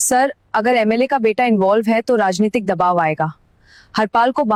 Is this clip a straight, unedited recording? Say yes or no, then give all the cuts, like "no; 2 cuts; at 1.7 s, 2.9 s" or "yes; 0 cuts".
yes; 0 cuts